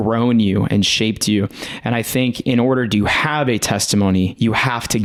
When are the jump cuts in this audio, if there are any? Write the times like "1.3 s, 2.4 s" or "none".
none